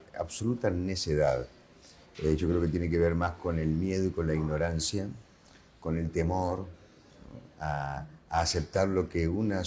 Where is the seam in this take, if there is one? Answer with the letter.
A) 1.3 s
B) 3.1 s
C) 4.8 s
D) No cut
D